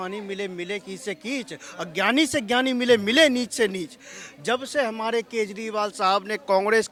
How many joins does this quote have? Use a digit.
0